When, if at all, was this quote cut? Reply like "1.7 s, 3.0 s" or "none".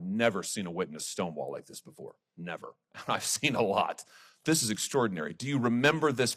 2.9 s